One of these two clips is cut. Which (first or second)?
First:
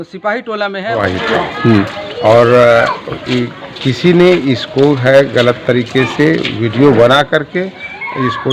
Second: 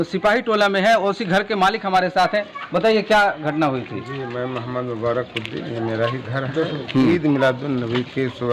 first